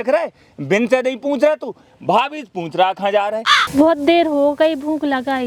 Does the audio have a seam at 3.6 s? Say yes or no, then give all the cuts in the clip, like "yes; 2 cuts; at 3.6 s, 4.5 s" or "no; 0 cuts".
yes; 1 cut; at 3.6 s